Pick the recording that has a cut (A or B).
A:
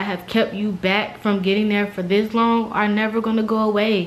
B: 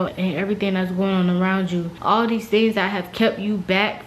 B